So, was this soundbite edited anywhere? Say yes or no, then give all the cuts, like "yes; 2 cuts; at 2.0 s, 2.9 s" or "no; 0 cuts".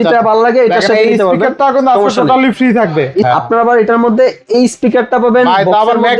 yes; 1 cut; at 3.3 s